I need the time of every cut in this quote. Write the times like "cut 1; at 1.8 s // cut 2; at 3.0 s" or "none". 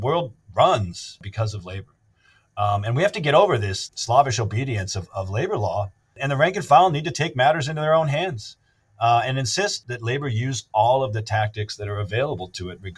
cut 1; at 1.2 s // cut 2; at 6.2 s

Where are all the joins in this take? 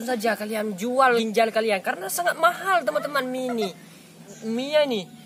cut 1; at 1.2 s // cut 2; at 4.2 s

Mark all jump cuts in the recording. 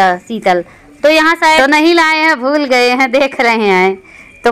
cut 1; at 1.6 s

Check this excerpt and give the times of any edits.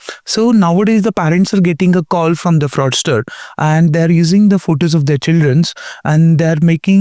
none

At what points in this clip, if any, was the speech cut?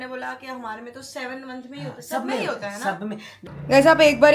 cut 1; at 3.4 s

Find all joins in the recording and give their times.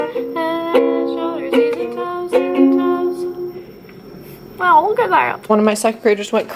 cut 1; at 5.4 s

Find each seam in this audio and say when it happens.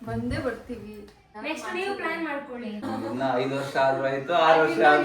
cut 1; at 1.2 s // cut 2; at 2.8 s

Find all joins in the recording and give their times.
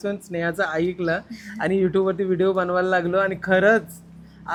none

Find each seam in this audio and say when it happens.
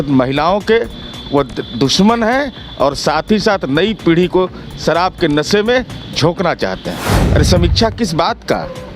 cut 1; at 7.1 s

